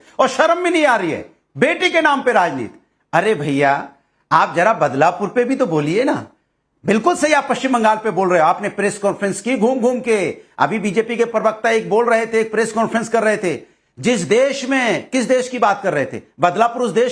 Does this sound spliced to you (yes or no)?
no